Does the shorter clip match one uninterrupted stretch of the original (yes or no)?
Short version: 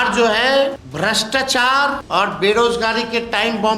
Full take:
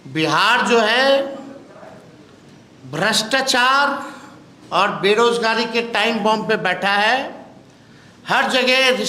no